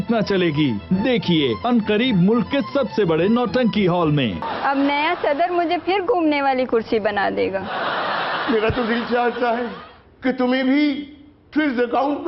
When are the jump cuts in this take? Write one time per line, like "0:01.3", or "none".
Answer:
0:04.5